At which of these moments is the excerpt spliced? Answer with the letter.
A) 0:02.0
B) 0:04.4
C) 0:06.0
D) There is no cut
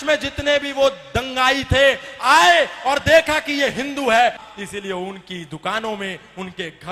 B